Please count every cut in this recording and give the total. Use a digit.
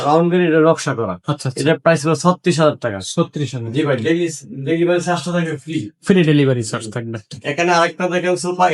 0